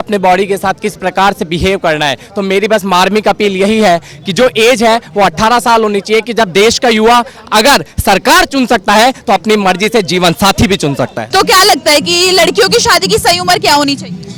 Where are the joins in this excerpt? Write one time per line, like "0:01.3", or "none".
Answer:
none